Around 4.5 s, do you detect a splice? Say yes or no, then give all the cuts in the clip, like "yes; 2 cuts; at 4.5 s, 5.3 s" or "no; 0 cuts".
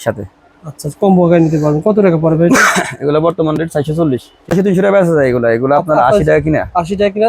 yes; 1 cut; at 4.5 s